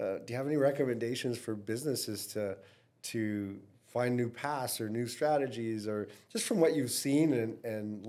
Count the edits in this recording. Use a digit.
0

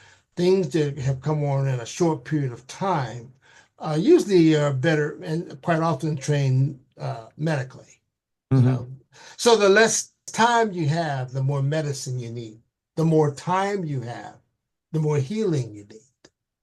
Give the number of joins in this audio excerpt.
1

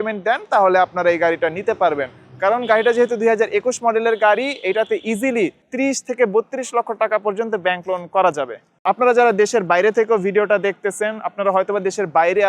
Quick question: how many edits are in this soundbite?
2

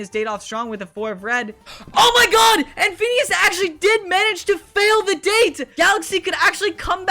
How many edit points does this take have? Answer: 0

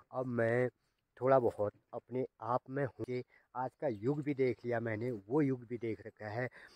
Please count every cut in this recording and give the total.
1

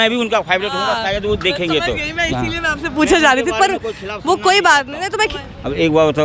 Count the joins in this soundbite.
1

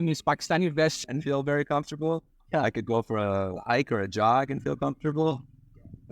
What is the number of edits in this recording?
1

